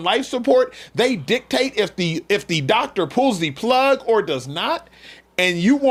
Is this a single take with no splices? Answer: yes; 0 cuts

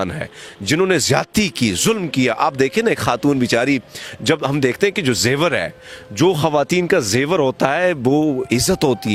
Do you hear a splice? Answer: no; 0 cuts

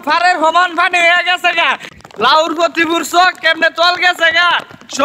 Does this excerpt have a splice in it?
yes; 1 cut; at 1.9 s

